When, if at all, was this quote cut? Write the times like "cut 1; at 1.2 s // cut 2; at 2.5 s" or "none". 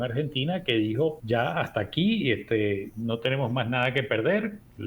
cut 1; at 1.2 s